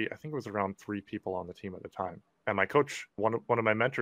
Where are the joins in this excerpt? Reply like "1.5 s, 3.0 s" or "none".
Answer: 2.3 s